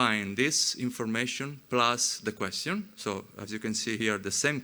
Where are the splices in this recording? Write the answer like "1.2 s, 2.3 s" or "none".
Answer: none